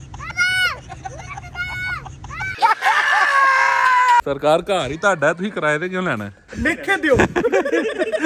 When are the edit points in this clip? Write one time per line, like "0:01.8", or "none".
0:04.2
0:06.4